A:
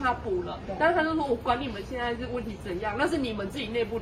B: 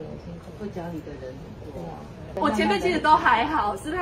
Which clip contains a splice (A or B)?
B